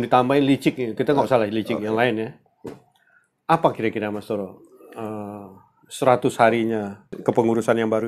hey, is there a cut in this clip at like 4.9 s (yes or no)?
no